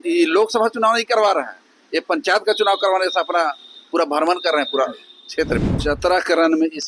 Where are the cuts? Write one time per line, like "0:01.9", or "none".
0:05.7